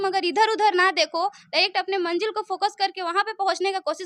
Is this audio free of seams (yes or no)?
yes